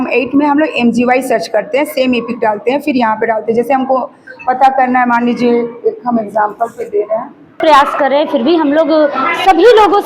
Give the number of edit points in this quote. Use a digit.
1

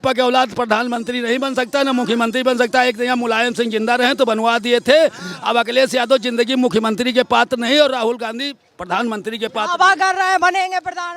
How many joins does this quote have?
0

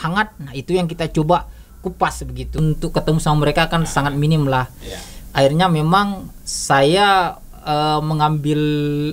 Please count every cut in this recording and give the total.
1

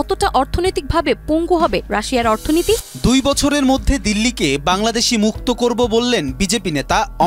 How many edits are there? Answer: 1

